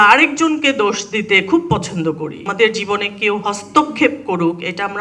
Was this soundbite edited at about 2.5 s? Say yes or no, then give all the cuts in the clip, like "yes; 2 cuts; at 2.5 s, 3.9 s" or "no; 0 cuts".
yes; 1 cut; at 2.5 s